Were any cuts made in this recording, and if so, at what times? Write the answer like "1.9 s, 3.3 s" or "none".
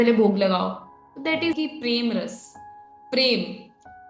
1.5 s